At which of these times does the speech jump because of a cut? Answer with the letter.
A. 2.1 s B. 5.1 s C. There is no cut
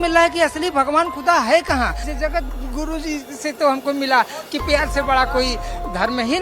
A